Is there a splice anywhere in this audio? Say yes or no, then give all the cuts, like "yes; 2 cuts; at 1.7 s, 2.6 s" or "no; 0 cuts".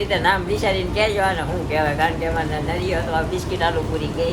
no; 0 cuts